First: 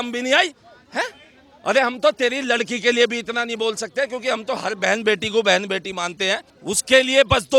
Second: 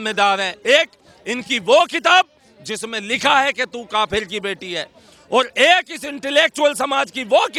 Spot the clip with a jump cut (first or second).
first